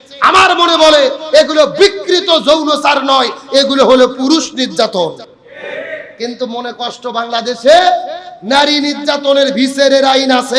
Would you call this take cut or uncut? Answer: uncut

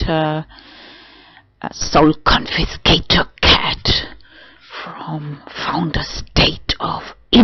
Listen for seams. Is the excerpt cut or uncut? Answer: cut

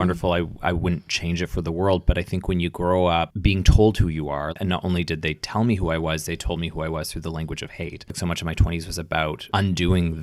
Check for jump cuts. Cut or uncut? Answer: cut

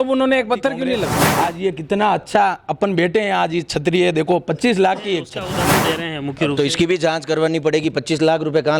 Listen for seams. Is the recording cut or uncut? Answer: cut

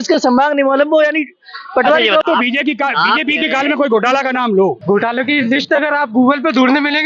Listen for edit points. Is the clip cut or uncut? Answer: cut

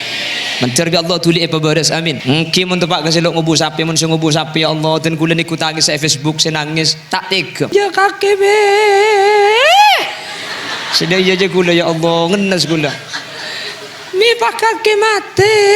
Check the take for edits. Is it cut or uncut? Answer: cut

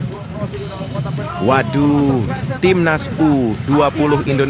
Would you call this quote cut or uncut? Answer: cut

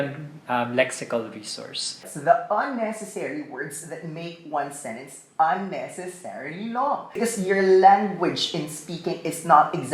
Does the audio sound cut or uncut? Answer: cut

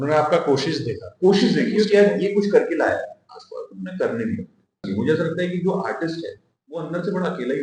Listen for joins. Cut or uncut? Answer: cut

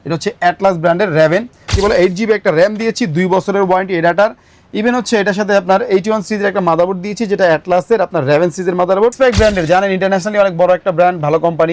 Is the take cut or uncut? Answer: cut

